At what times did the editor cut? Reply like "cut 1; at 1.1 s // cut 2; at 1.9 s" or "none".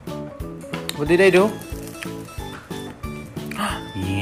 cut 1; at 0.9 s

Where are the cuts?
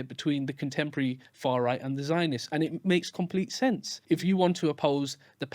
cut 1; at 3.9 s // cut 2; at 4.8 s

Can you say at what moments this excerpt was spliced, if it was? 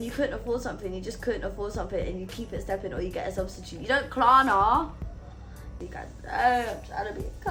none

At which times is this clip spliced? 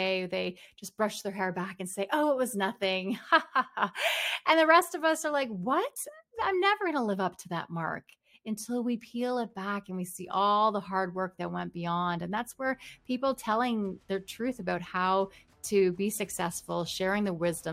none

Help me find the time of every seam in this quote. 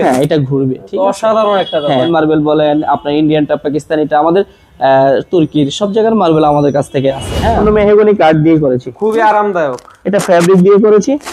cut 1; at 2.1 s // cut 2; at 7.5 s

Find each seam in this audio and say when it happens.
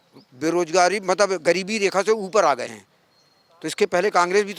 none

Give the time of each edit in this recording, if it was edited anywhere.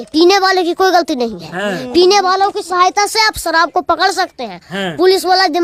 none

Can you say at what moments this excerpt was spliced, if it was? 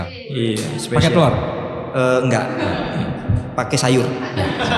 none

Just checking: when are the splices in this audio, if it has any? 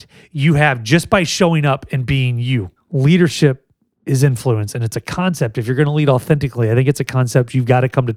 cut 1; at 2.8 s

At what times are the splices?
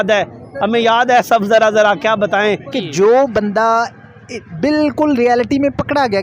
cut 1; at 2.8 s

